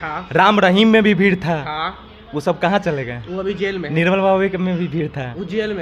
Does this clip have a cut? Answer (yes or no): no